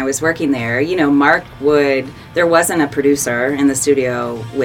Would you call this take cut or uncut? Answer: cut